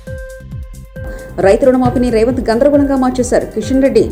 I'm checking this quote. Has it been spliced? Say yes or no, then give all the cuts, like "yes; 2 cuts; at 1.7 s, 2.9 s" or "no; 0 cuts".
no; 0 cuts